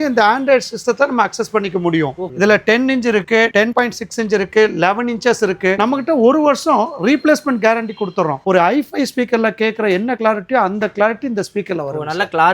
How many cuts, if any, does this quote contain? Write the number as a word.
three